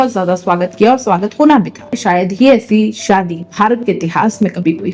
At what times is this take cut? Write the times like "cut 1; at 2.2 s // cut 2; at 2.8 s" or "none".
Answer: cut 1; at 2.0 s